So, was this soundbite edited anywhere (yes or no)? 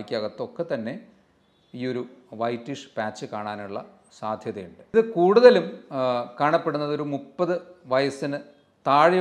yes